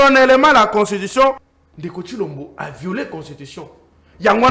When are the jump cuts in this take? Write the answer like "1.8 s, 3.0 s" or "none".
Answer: 1.5 s